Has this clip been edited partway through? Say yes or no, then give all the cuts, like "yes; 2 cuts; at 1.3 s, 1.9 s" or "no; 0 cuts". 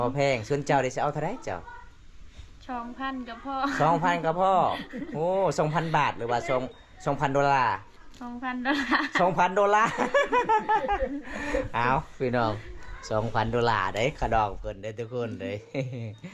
no; 0 cuts